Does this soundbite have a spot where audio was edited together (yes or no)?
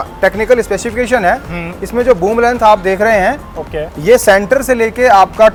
no